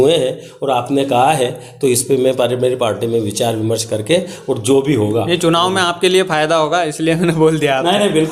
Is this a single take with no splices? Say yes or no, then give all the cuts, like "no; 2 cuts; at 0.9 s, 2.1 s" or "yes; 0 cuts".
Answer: yes; 0 cuts